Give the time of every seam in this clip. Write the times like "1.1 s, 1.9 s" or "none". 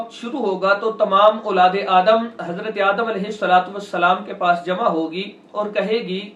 none